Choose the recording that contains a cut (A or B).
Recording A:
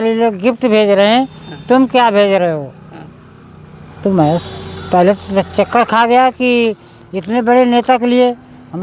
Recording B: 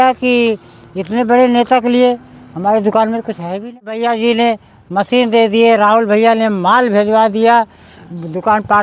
B